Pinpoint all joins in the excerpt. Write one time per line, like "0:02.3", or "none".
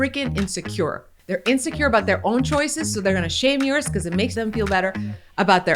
0:01.1
0:04.3